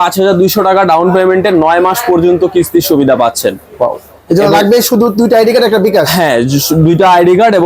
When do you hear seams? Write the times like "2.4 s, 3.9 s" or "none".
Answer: none